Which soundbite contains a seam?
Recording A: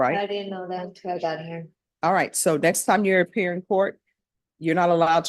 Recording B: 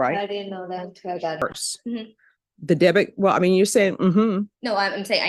B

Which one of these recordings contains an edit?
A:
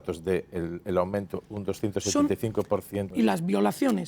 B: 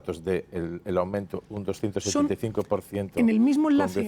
A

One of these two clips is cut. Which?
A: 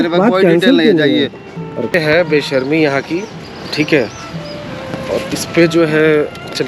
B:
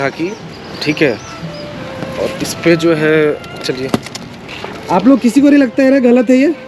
A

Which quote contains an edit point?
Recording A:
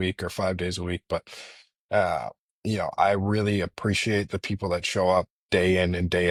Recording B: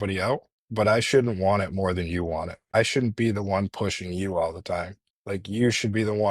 B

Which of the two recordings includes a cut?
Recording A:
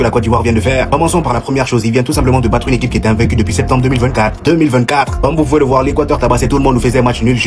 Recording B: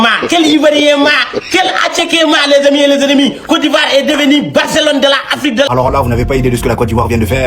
B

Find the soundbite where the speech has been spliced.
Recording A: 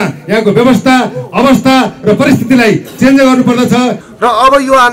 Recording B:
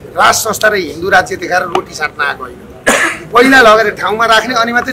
A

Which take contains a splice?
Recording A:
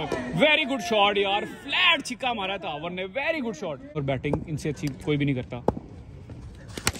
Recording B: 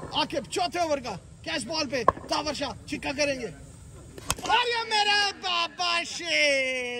A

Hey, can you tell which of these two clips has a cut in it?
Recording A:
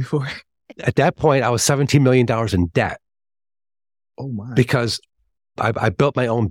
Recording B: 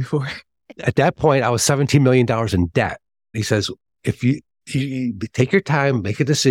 B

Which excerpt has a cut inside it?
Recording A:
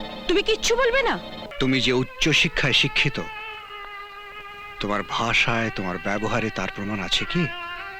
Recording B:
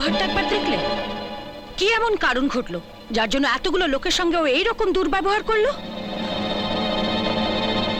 A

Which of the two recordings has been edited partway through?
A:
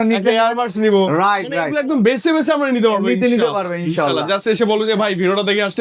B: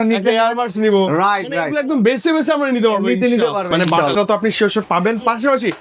B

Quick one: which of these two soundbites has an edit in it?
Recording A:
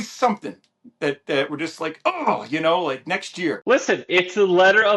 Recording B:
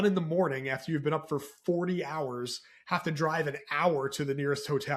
A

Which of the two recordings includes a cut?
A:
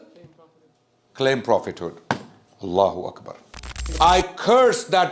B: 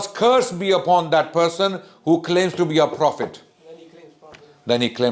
A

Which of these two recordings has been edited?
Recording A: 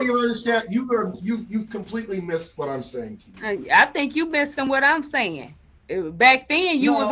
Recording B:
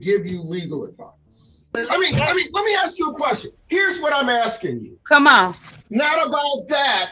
B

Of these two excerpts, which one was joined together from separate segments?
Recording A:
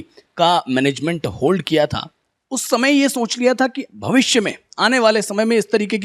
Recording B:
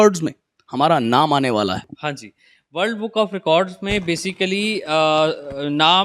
B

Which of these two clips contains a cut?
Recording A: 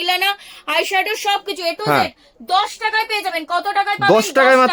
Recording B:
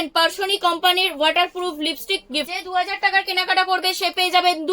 B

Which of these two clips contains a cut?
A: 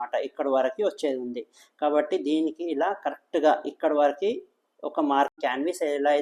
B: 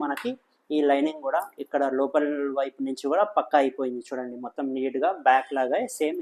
A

